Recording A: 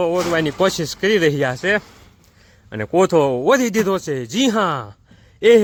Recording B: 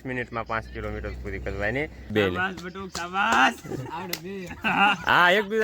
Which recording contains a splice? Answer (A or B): B